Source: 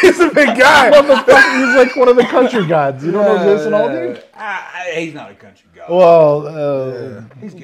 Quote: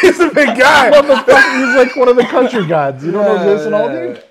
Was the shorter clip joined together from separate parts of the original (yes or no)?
no